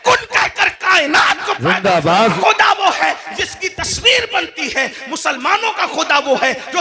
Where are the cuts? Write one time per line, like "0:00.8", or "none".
0:02.3

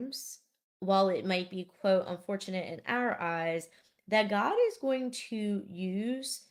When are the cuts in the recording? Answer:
none

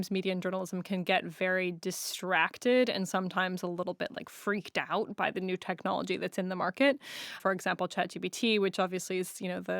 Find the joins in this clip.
0:07.4

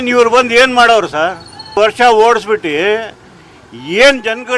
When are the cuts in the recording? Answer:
0:01.5

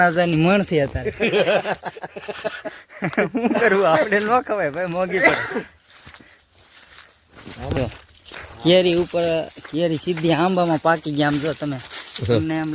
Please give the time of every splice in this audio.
0:07.8

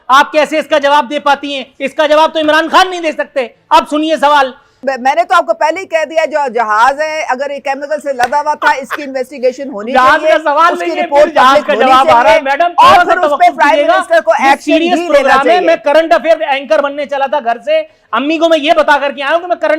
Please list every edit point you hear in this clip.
0:04.9

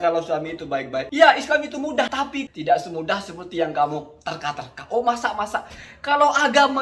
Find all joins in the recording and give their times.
0:01.1
0:02.2

